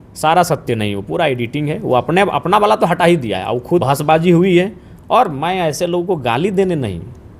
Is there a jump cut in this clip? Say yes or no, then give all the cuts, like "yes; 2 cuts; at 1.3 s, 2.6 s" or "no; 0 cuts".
yes; 1 cut; at 3.8 s